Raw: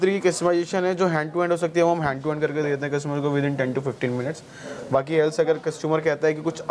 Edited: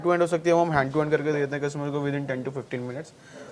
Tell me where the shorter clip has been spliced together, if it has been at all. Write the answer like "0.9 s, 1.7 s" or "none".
none